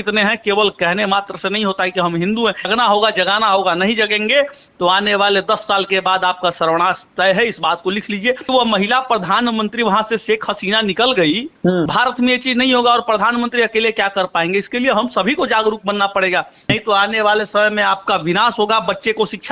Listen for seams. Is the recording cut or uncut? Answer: cut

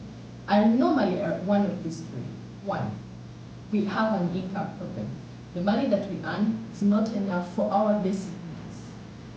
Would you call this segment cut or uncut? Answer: uncut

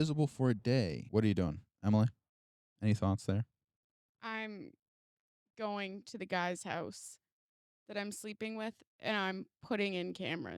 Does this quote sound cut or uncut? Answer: cut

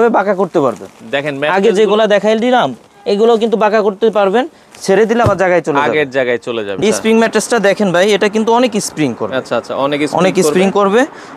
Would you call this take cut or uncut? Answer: cut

